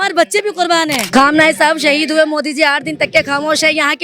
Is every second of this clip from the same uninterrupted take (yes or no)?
no